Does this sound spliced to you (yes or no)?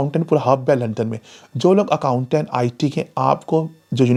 no